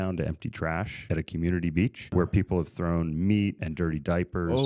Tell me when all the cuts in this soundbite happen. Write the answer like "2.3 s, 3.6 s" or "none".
0.9 s, 2.0 s, 3.6 s